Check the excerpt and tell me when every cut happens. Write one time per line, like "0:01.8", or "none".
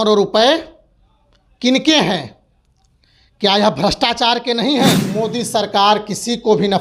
0:05.2